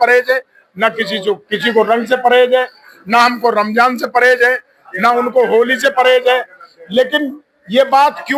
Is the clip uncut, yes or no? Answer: yes